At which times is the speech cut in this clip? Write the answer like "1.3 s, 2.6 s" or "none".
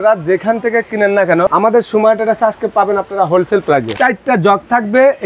1.5 s, 3.9 s